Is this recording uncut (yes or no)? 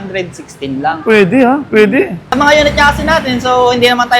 no